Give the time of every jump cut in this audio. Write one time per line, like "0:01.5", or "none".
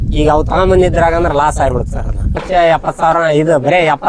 0:02.4